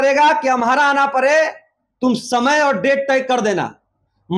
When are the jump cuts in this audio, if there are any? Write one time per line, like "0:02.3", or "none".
none